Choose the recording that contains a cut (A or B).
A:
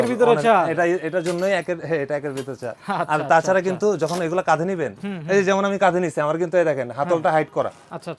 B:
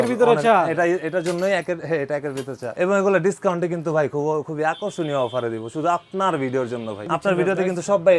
B